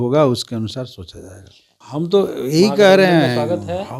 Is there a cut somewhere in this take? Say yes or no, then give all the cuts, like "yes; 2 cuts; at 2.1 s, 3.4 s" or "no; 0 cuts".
yes; 1 cut; at 1.8 s